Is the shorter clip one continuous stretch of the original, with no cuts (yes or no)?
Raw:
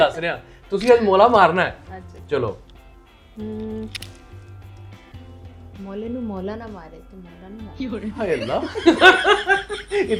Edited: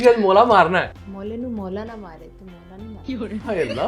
no